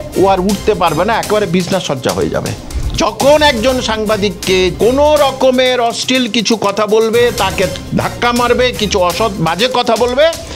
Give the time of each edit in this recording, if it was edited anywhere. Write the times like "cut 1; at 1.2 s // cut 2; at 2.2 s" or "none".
cut 1; at 2.6 s // cut 2; at 4.7 s // cut 3; at 7.8 s